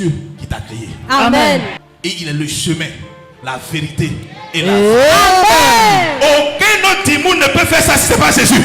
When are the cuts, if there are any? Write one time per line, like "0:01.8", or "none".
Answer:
0:01.8